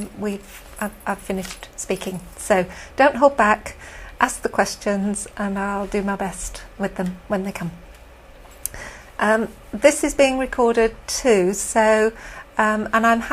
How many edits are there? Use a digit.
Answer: 0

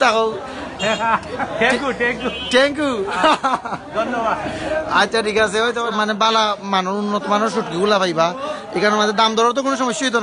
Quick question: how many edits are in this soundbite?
1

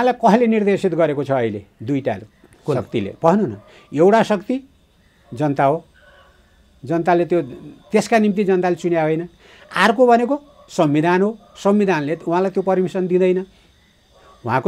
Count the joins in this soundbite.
0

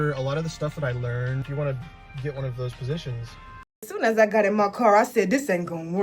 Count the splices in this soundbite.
2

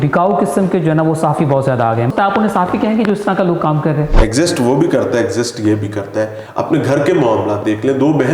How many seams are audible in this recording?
3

